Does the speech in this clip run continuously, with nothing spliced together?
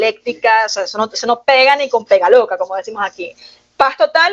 yes; 0 cuts

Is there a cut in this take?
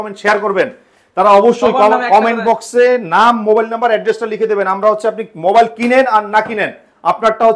no; 0 cuts

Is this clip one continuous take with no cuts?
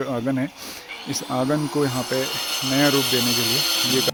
yes; 0 cuts

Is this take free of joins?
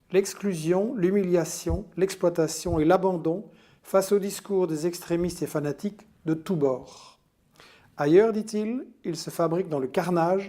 no; 1 cut; at 6.2 s

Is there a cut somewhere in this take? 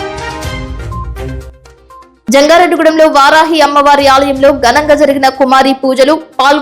no; 0 cuts

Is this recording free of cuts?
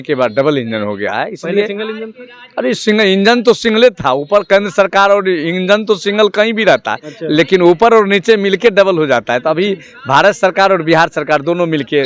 yes; 0 cuts

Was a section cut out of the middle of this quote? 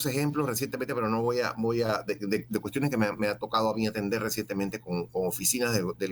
no; 0 cuts

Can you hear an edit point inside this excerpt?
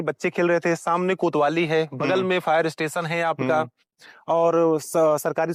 no; 0 cuts

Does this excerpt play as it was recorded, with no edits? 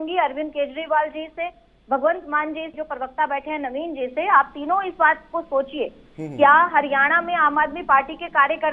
yes; 0 cuts

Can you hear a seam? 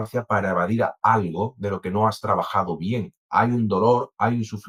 no; 0 cuts

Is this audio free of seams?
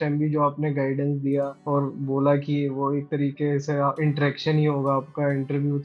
no; 1 cut; at 1.6 s

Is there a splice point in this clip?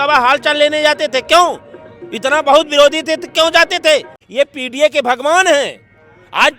yes; 1 cut; at 4.2 s

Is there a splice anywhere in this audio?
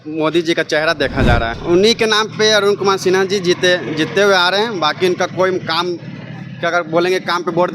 yes; 1 cut; at 1.5 s

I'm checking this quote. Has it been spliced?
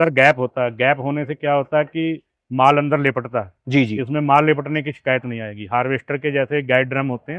no; 0 cuts

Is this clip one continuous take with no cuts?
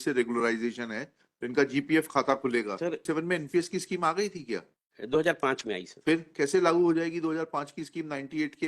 no; 1 cut; at 3.0 s

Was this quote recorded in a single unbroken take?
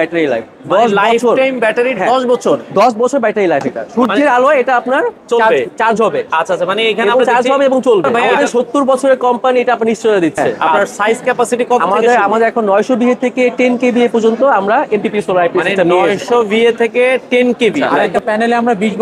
no; 4 cuts; at 3.8 s, 8.2 s, 10.5 s, 18.1 s

